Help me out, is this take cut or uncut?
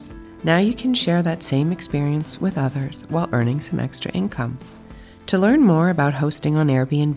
uncut